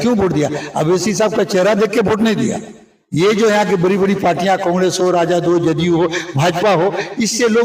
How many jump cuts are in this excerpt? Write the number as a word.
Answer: zero